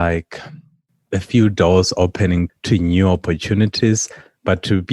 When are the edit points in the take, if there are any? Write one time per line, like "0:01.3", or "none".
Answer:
0:02.5